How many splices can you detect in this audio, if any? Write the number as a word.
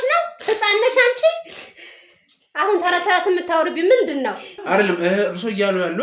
one